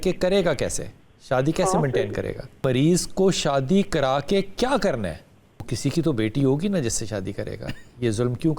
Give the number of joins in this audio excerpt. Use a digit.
2